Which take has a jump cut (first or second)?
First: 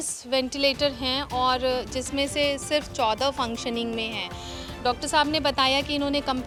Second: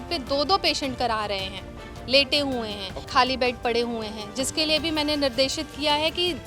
second